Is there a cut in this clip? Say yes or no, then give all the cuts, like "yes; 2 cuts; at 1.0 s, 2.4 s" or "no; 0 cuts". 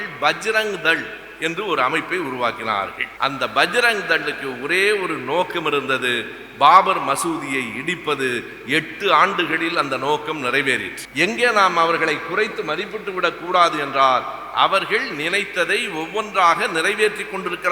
yes; 2 cuts; at 3.0 s, 11.0 s